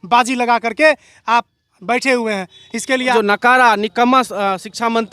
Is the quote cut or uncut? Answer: cut